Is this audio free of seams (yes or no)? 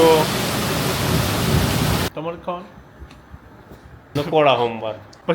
no